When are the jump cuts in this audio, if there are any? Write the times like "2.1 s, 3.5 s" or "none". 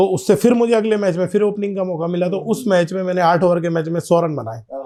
none